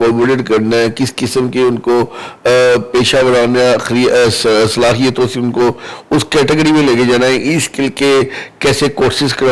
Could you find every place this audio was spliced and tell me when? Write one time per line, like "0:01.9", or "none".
none